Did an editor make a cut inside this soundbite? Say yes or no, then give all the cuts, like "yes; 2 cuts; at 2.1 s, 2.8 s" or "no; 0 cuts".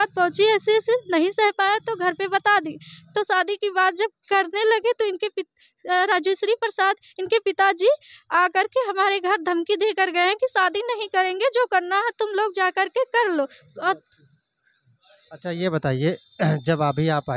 no; 0 cuts